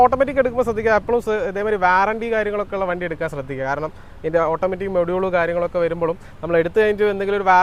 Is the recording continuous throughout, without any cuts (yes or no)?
yes